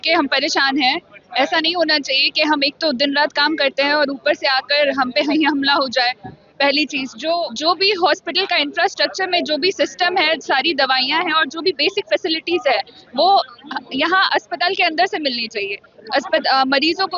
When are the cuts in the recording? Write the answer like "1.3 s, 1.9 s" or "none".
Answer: 7.5 s